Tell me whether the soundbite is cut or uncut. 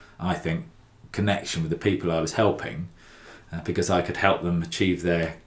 uncut